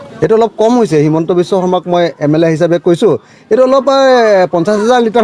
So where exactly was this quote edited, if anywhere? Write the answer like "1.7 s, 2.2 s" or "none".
none